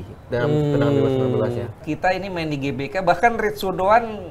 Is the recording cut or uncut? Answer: cut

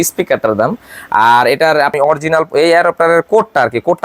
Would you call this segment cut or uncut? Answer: cut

